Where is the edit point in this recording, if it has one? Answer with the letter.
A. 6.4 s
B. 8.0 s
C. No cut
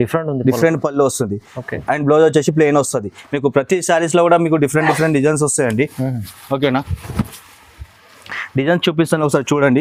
C